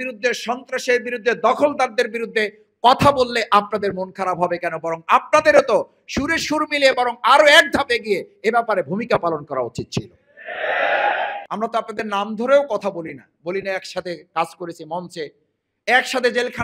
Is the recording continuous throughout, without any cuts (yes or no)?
no